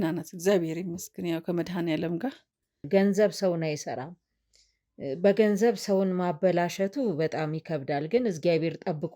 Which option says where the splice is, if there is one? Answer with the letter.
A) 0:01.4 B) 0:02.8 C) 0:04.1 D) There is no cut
B